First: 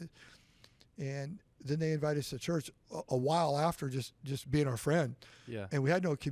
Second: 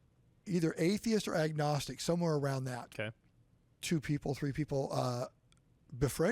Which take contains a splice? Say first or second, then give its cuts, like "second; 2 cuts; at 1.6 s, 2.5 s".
second; 1 cut; at 3.3 s